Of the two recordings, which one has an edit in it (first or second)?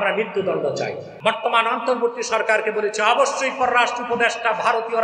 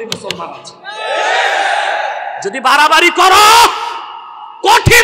first